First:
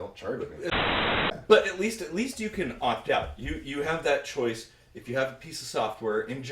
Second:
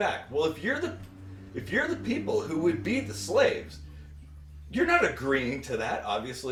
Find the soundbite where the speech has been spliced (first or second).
first